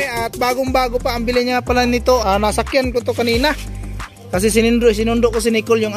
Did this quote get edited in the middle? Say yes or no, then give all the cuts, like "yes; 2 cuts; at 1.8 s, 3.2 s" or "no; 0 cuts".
yes; 1 cut; at 2.3 s